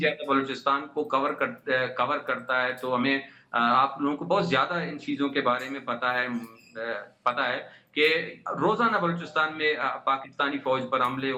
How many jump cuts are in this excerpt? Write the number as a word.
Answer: zero